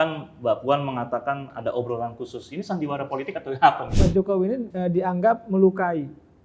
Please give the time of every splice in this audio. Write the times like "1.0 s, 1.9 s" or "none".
3.9 s